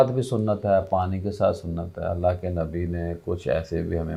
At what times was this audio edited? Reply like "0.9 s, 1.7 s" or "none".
none